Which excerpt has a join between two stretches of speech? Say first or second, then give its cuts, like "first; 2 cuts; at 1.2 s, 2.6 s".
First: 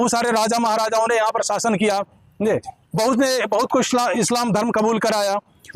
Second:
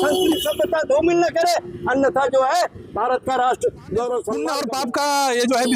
second; 1 cut; at 4.5 s